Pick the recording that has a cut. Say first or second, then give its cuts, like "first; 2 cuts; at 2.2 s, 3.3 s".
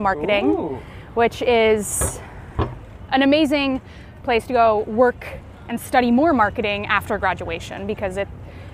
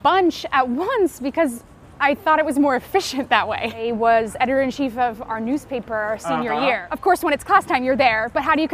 second; 2 cuts; at 3.8 s, 6.9 s